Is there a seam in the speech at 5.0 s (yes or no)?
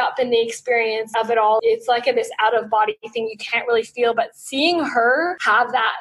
no